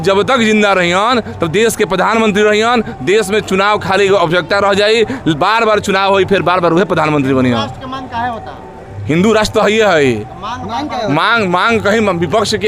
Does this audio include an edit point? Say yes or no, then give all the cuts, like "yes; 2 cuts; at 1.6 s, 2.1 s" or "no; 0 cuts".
no; 0 cuts